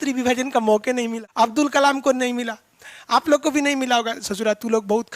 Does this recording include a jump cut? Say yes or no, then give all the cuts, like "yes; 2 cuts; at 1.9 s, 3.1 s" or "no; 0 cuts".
yes; 1 cut; at 1.2 s